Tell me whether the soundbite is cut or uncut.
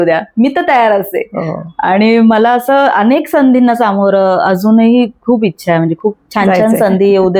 uncut